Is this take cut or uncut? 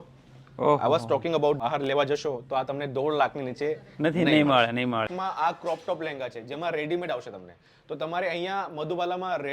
cut